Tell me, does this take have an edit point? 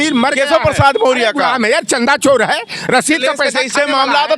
no; 0 cuts

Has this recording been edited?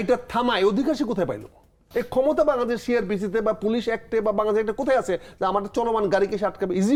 no; 0 cuts

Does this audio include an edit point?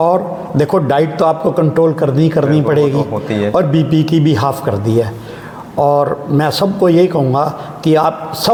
no; 0 cuts

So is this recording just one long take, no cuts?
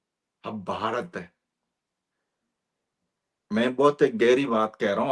yes; 0 cuts

